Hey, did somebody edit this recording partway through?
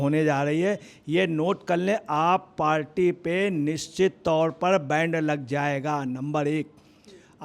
no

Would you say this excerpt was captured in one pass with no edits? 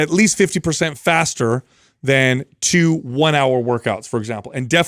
yes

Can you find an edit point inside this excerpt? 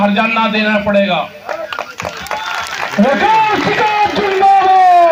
no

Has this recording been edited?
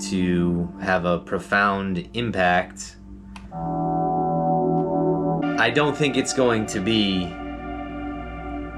yes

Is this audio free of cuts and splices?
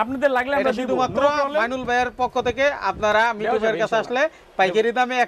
yes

